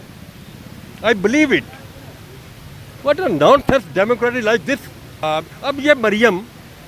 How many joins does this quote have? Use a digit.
1